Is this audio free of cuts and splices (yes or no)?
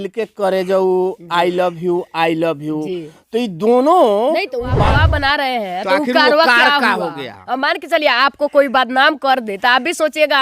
no